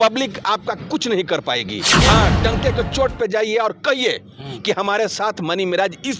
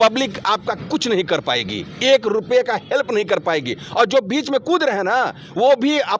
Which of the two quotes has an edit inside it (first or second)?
first